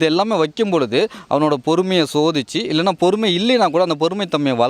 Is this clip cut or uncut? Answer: uncut